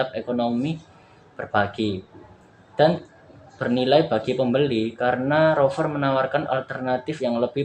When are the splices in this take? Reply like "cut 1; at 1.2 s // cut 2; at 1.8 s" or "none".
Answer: none

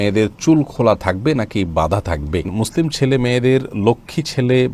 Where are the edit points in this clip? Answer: cut 1; at 2.5 s

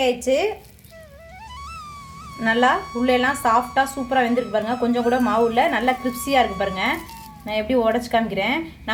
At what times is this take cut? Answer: none

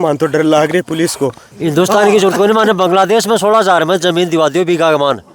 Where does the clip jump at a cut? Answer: cut 1; at 1.5 s

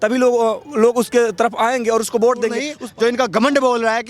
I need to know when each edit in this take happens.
cut 1; at 2.8 s

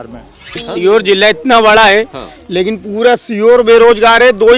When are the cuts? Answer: none

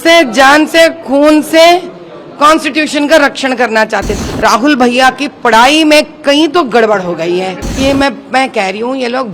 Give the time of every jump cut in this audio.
cut 1; at 4.1 s // cut 2; at 7.6 s

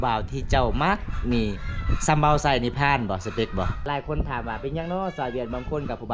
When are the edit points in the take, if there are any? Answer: cut 1; at 3.8 s

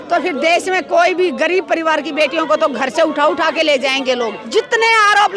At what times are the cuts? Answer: cut 1; at 4.4 s

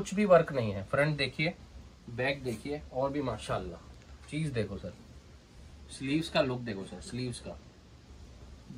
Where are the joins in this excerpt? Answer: none

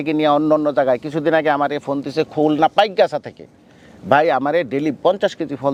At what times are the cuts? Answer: none

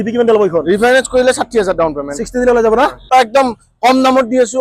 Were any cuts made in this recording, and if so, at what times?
cut 1; at 3.1 s

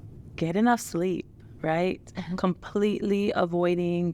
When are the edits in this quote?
cut 1; at 2.3 s

